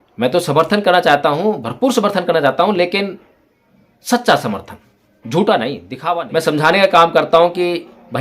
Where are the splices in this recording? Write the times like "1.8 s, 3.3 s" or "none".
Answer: 5.9 s